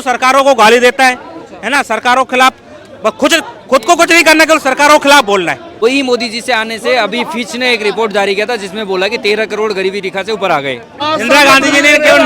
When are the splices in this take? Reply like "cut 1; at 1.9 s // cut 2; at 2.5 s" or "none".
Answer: cut 1; at 5.7 s // cut 2; at 10.9 s